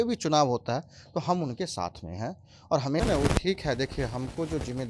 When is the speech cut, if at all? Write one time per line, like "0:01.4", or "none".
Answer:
0:03.0